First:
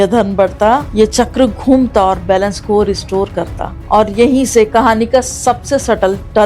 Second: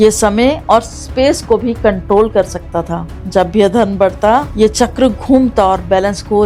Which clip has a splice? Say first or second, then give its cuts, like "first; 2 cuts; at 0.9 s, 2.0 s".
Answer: first; 1 cut; at 3.8 s